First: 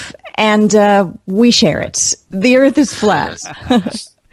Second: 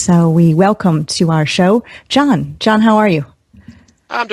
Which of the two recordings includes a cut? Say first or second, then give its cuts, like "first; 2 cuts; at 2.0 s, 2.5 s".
first; 1 cut; at 1.6 s